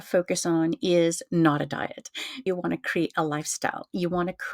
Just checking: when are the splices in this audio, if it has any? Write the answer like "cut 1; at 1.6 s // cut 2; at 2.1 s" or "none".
cut 1; at 2.4 s